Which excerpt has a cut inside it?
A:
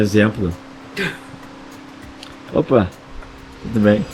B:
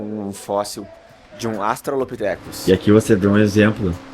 B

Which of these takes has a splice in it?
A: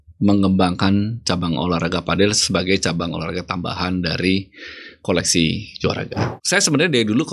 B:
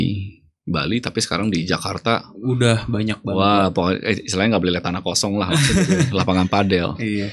A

